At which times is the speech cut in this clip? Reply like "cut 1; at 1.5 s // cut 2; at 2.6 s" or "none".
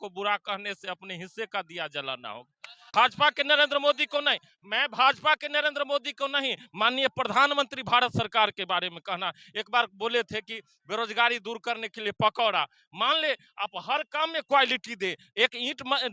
cut 1; at 2.9 s